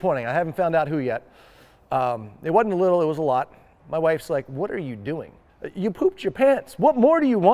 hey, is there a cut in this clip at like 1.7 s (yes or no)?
no